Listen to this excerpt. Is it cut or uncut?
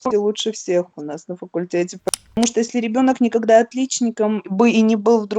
cut